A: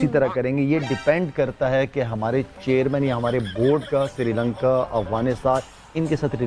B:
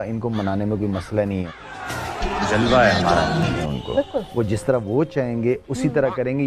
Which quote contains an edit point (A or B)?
B